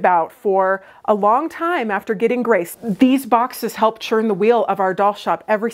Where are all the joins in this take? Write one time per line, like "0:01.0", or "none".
0:02.7